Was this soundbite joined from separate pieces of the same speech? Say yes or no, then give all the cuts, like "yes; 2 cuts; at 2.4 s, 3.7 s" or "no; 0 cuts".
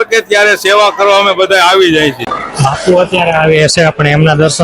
yes; 1 cut; at 2.4 s